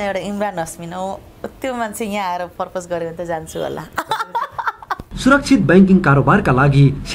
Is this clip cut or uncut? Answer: cut